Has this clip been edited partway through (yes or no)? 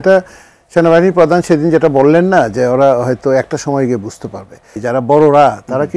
yes